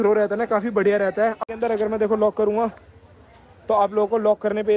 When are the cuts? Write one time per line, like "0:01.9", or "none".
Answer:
0:01.5